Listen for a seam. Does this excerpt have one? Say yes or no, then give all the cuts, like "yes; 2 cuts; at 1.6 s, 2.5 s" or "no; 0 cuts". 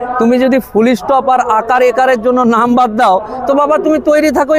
no; 0 cuts